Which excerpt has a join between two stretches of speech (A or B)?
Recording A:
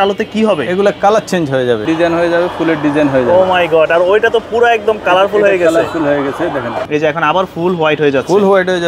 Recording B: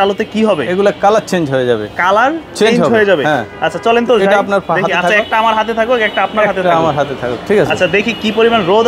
A